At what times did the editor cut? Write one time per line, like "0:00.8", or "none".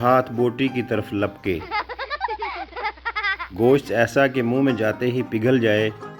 0:01.6
0:03.4